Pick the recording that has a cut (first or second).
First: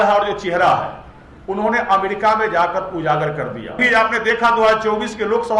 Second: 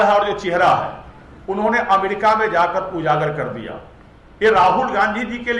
first